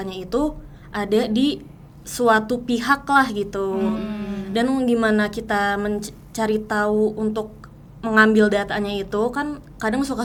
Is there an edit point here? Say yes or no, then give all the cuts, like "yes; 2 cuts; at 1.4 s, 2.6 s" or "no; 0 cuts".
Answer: no; 0 cuts